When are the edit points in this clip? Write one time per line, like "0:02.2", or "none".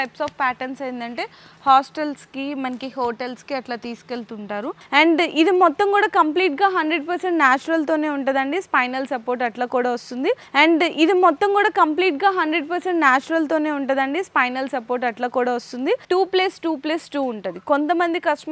0:04.8
0:10.4
0:16.0